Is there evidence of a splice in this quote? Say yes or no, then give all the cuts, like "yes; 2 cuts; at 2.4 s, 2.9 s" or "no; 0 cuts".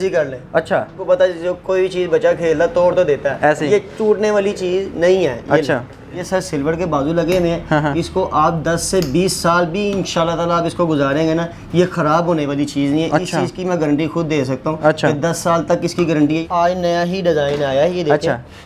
yes; 3 cuts; at 1.0 s, 6.2 s, 16.4 s